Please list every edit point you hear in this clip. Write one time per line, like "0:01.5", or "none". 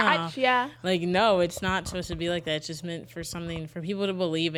none